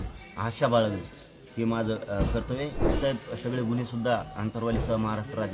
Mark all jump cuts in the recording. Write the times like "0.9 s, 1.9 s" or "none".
3.0 s